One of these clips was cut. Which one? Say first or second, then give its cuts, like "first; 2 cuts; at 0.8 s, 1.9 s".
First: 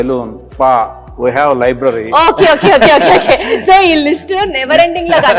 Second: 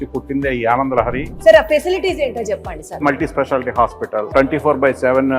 second; 3 cuts; at 1.3 s, 3.0 s, 4.3 s